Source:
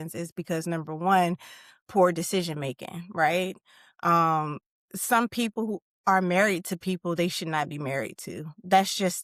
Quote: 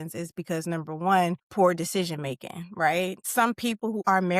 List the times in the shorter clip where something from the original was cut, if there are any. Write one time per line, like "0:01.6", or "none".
0:01.4
0:03.7